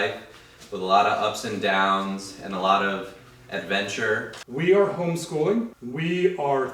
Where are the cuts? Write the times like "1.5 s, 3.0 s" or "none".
4.4 s, 5.8 s